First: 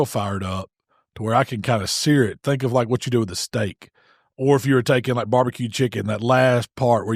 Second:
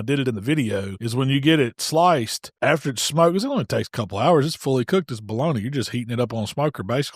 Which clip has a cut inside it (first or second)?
second